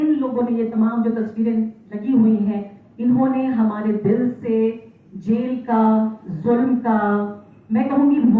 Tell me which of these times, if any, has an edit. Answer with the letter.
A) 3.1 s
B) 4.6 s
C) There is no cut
C